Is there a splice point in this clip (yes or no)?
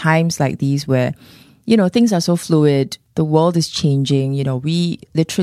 no